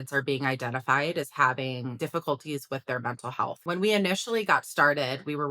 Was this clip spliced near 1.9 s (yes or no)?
yes